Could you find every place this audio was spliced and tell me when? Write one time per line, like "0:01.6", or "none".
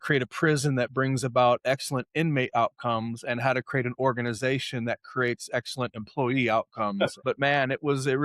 0:07.2

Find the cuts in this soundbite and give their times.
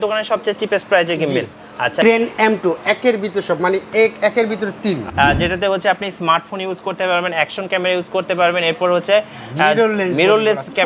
0:02.0
0:05.0

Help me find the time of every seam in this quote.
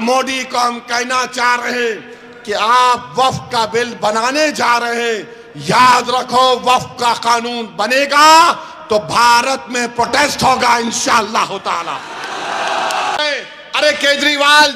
0:13.2

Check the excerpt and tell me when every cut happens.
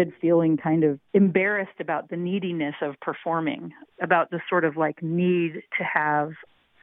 0:01.0

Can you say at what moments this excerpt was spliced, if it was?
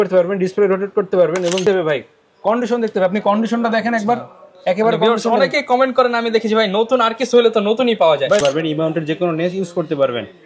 0:01.6
0:08.4

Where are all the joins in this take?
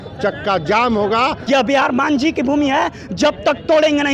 0:01.4

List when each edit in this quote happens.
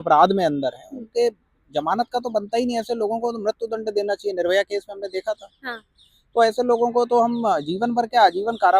none

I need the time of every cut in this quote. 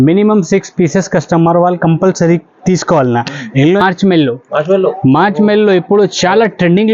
0:03.8

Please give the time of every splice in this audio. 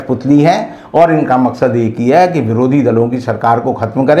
none

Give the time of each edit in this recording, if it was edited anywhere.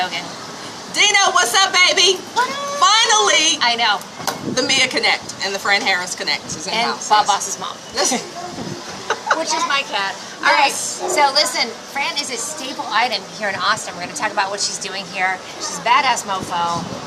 0:08.3

